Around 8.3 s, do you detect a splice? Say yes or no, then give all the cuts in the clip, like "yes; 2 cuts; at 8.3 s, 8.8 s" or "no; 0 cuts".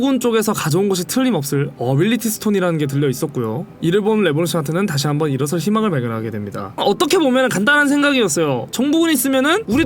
no; 1 cut; at 6.7 s